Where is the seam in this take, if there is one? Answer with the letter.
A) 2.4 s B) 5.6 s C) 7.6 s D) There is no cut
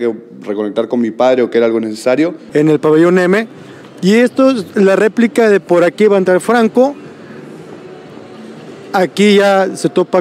A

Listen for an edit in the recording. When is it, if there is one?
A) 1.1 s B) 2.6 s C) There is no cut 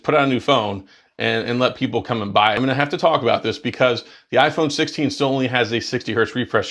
B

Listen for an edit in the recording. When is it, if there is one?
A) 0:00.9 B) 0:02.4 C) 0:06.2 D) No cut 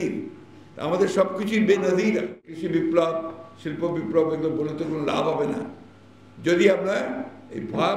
B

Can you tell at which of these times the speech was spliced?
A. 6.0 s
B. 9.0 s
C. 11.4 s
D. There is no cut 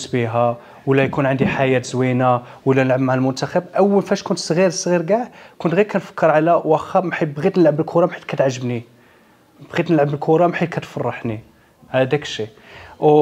D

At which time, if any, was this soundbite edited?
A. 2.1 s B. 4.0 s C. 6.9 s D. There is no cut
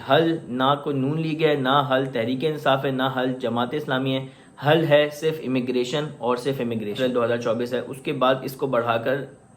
C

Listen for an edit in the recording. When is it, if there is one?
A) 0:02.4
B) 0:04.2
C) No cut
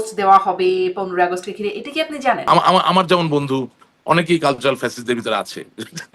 A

